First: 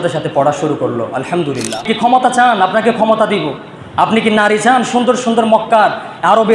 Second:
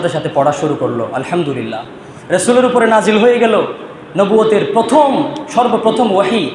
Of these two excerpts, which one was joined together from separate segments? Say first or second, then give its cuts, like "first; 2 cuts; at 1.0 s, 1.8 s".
first; 1 cut; at 1.8 s